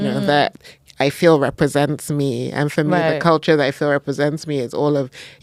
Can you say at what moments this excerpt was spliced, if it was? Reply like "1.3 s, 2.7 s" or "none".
none